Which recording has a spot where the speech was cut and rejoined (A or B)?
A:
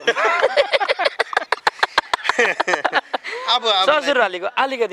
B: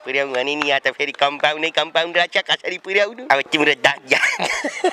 B